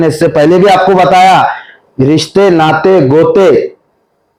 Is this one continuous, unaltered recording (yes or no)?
yes